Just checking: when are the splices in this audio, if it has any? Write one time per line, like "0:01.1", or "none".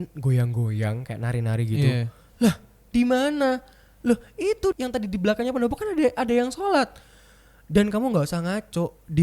0:04.7